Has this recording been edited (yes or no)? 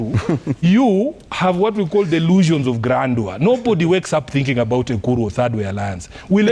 no